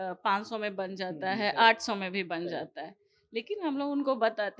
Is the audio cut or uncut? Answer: uncut